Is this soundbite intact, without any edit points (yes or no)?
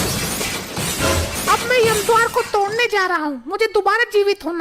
no